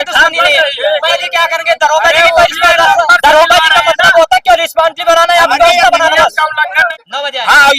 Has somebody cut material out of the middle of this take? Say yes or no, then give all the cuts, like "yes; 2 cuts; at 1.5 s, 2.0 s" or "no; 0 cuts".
yes; 2 cuts; at 1.1 s, 6.8 s